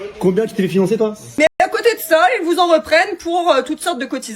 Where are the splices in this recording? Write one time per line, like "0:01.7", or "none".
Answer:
0:01.6